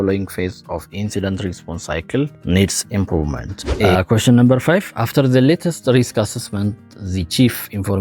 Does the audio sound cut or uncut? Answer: cut